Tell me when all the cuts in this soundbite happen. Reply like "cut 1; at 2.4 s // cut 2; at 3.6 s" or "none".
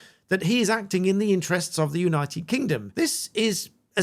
cut 1; at 2.9 s

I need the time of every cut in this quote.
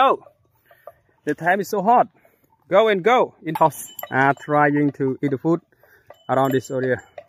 cut 1; at 3.5 s

